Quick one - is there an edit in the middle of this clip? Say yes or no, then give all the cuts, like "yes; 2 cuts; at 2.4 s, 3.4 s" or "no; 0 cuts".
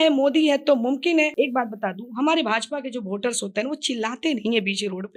yes; 1 cut; at 1.3 s